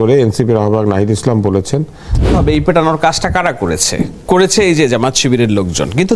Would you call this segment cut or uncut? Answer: cut